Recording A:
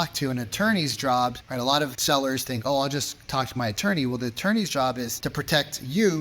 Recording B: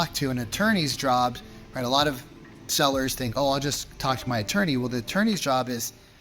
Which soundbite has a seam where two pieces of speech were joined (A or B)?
A